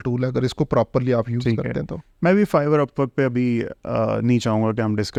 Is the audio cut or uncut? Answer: uncut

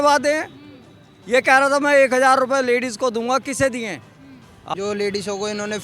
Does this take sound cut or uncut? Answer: cut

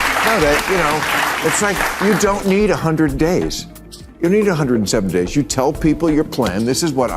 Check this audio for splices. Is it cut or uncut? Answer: uncut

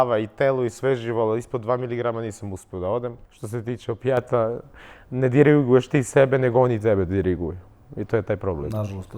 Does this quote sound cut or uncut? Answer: cut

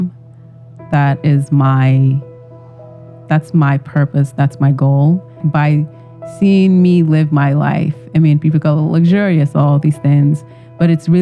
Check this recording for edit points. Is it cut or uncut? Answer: cut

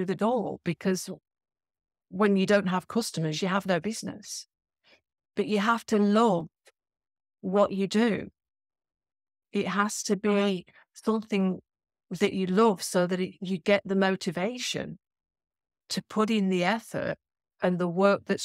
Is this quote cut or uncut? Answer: uncut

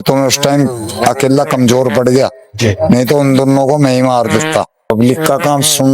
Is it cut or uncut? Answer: cut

